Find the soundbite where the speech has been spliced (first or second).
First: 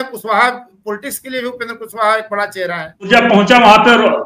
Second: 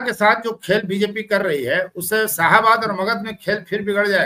first